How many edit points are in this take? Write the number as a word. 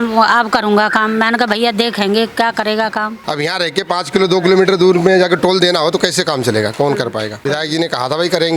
two